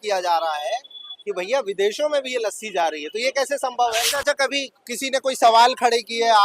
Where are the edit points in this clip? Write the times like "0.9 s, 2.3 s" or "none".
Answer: 4.2 s